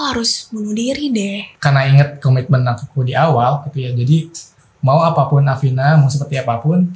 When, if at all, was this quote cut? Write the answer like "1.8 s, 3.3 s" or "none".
1.5 s

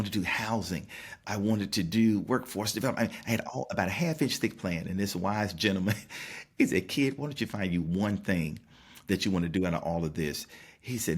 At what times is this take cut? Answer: 1.1 s

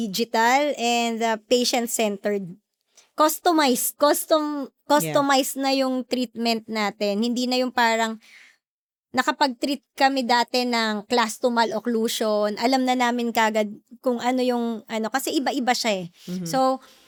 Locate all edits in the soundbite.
none

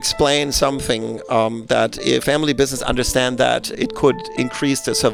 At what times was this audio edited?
none

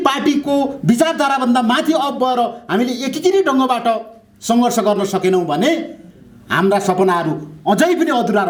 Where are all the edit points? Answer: none

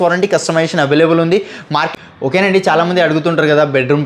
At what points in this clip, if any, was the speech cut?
1.9 s

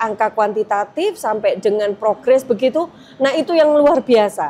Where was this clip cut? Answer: none

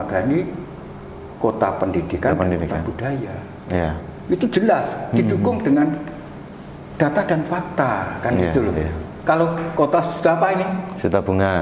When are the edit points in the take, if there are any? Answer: none

